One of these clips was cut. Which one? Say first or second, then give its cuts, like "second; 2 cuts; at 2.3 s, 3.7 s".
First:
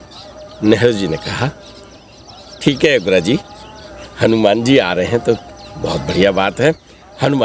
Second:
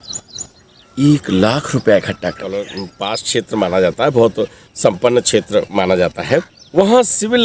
second; 1 cut; at 2.4 s